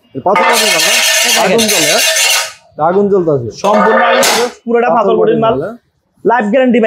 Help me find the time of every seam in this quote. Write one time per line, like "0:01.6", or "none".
none